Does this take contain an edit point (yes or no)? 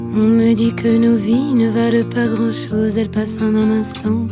no